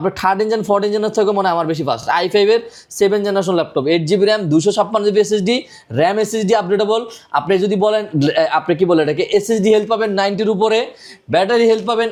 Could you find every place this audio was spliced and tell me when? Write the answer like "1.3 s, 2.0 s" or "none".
none

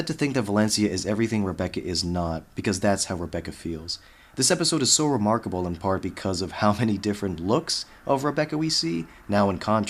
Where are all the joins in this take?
7.9 s

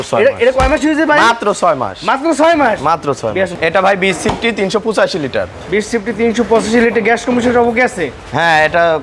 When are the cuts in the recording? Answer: none

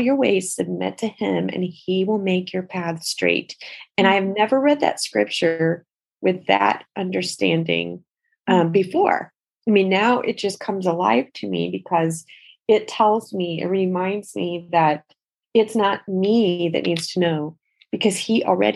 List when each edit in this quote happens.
none

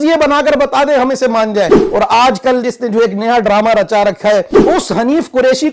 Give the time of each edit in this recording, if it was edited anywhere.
1.8 s, 4.5 s

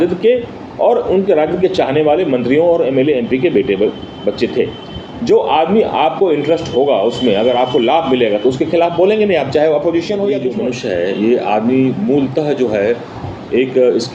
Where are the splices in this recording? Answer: 10.5 s

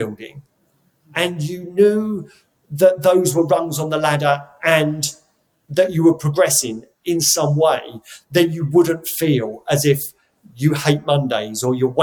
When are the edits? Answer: none

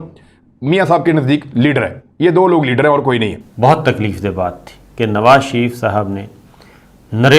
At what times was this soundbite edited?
3.4 s

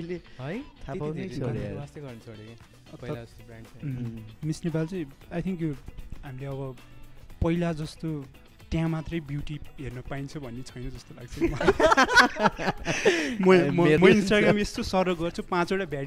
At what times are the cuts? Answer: 14.0 s

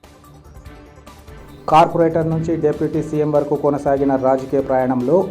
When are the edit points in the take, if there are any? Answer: 1.4 s

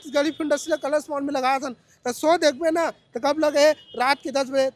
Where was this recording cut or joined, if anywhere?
none

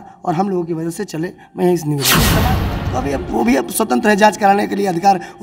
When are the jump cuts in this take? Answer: 2.4 s

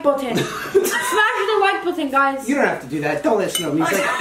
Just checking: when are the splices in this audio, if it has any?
none

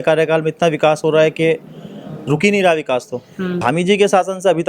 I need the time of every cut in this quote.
3.6 s

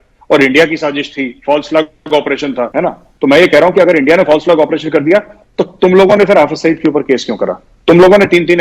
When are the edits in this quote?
2.7 s

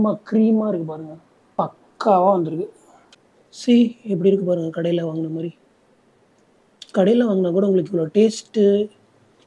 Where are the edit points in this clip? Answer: none

